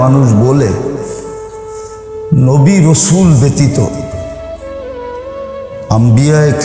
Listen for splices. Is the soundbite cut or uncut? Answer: cut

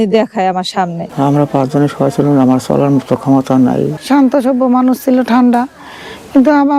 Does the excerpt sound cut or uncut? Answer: cut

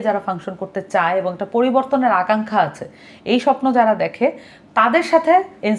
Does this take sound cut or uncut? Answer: uncut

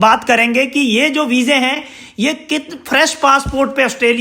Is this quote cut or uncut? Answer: uncut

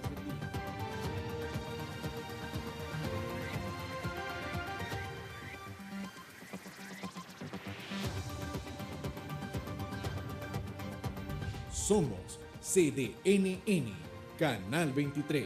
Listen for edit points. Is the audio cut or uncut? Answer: uncut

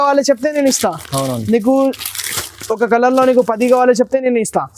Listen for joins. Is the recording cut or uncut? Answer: uncut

